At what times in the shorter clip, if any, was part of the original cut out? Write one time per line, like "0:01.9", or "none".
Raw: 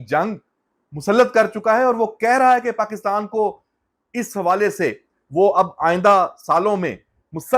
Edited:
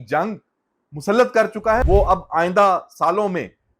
0:01.8